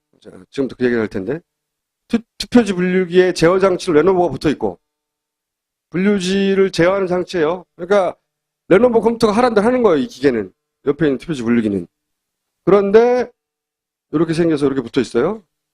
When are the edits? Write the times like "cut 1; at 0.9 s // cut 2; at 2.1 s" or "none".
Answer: cut 1; at 11.1 s